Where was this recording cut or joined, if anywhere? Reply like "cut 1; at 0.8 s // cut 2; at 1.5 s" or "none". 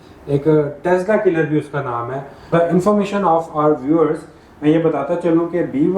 cut 1; at 2.5 s